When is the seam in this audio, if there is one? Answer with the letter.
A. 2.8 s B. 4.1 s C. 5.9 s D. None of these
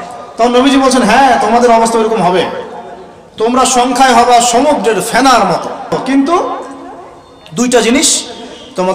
C